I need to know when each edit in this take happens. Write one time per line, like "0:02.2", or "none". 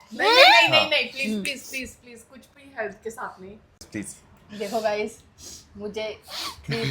0:03.8